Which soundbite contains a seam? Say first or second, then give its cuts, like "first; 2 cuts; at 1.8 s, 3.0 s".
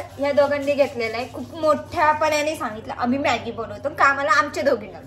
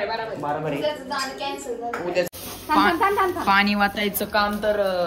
second; 1 cut; at 2.3 s